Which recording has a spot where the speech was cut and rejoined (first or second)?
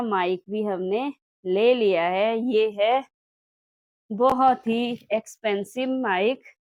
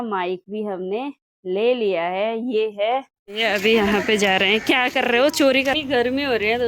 second